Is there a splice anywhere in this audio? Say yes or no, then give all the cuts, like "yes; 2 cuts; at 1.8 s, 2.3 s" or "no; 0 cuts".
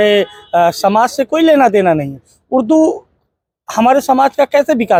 no; 0 cuts